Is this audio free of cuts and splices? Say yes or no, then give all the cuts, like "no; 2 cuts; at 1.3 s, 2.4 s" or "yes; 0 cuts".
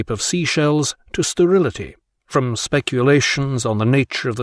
yes; 0 cuts